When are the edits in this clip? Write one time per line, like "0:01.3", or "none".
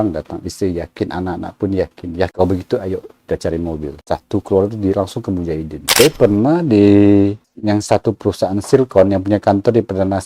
0:02.3
0:05.8